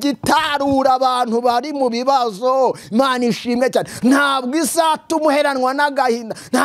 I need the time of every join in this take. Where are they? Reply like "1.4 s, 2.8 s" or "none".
none